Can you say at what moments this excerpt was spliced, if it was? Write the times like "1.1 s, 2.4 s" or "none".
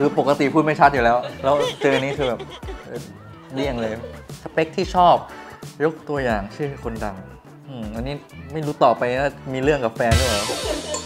4.2 s